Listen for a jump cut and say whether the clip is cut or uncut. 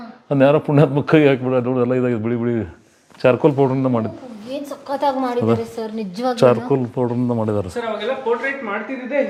uncut